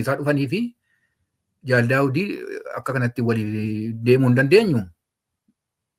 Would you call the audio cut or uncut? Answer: uncut